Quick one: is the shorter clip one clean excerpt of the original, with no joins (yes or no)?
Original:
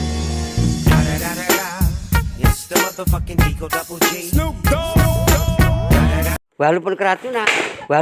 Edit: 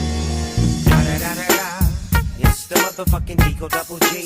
yes